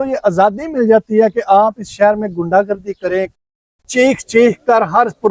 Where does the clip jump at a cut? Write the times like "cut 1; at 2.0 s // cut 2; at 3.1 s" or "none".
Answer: cut 1; at 3.8 s